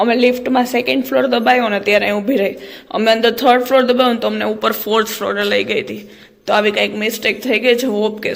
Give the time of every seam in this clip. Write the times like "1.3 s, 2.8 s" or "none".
none